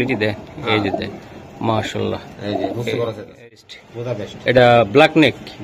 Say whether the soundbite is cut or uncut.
cut